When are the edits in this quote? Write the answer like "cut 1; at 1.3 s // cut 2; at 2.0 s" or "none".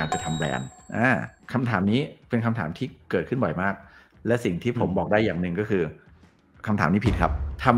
none